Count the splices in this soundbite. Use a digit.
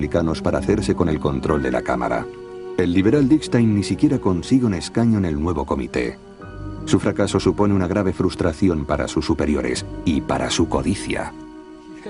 1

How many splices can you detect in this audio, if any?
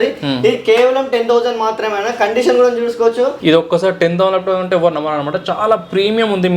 1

